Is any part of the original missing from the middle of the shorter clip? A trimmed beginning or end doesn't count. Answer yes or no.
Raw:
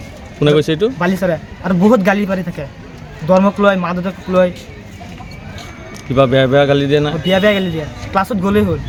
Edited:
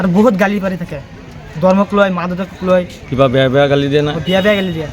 yes